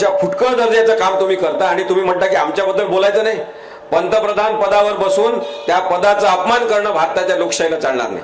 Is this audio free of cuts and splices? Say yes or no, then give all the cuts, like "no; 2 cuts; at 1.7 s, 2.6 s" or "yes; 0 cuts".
yes; 0 cuts